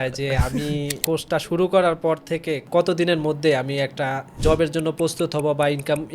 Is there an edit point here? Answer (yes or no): yes